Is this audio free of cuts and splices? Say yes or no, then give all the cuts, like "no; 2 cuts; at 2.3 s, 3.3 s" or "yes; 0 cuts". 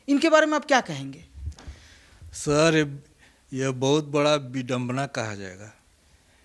yes; 0 cuts